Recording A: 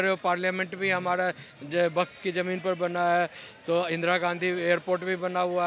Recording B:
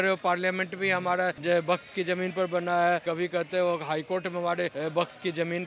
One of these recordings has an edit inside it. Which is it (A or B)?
B